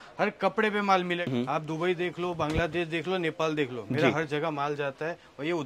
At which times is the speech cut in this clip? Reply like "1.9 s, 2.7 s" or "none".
1.2 s